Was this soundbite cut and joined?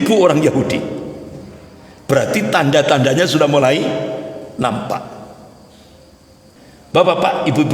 yes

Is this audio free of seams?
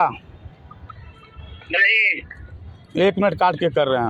yes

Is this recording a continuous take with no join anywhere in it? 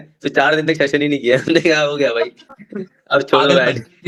yes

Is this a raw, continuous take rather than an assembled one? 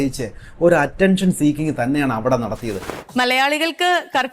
no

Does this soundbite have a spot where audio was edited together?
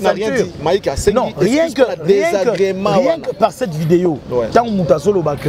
no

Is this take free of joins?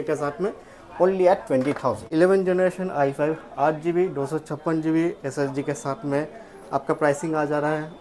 no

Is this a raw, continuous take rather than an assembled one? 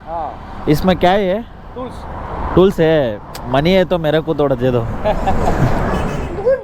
yes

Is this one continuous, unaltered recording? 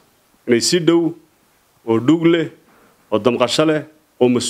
yes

